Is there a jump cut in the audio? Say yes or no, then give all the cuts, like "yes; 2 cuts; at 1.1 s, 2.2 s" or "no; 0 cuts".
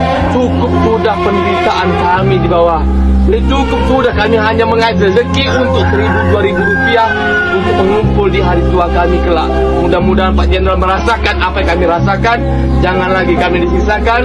no; 0 cuts